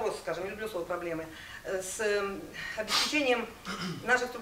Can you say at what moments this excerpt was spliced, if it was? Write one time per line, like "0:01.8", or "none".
none